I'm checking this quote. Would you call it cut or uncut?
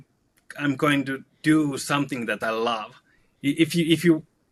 cut